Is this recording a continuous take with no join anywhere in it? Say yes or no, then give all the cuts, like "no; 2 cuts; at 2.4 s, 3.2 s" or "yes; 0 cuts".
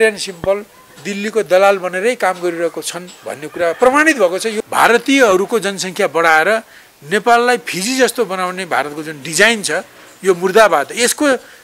no; 1 cut; at 4.5 s